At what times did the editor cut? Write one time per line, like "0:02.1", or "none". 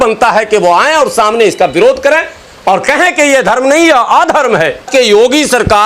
0:04.9